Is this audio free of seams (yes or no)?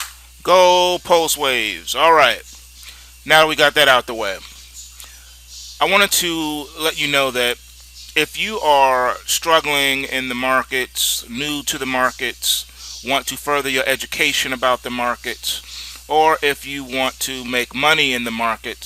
no